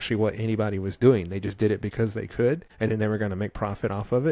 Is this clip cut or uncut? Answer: cut